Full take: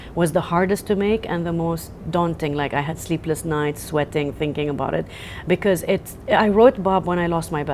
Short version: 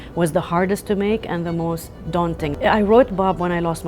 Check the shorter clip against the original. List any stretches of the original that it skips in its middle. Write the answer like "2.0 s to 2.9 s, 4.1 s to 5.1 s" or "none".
2.5 s to 6.2 s